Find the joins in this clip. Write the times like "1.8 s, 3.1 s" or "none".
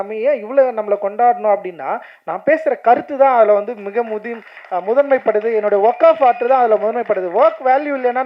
none